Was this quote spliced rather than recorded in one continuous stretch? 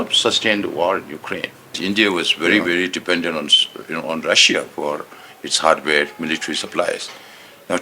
yes; 1 cut; at 1.8 s

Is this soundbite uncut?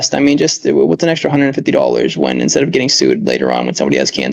yes; 0 cuts

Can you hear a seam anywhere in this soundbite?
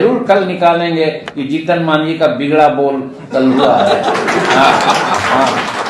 no; 0 cuts

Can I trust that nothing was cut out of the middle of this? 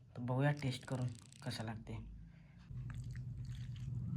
no; 1 cut; at 2.6 s

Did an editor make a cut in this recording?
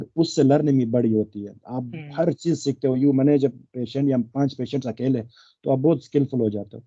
no; 0 cuts

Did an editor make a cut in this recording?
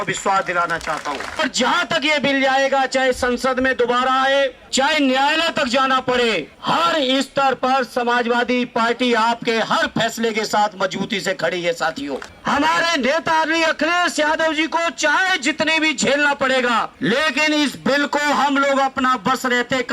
yes; 5 cuts; at 1.4 s, 4.6 s, 6.5 s, 12.3 s, 16.9 s

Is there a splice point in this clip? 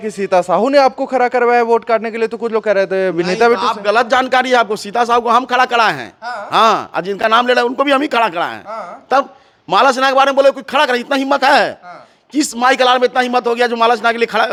no; 0 cuts

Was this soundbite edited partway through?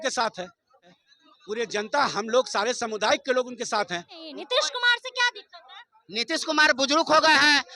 yes; 2 cuts; at 1.1 s, 4.3 s

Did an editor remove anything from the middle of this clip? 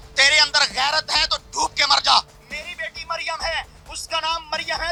no; 0 cuts

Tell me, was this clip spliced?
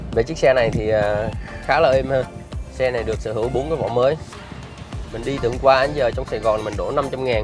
no; 0 cuts

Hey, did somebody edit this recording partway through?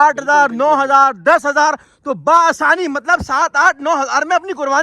no; 0 cuts

